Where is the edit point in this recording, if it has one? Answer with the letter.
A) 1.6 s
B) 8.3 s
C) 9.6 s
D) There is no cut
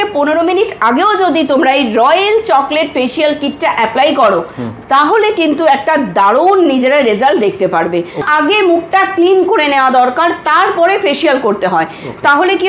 B